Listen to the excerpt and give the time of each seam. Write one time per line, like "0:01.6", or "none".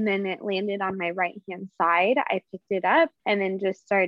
0:03.2